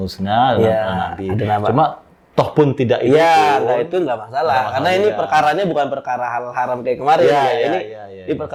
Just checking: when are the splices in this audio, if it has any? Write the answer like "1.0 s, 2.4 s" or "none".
none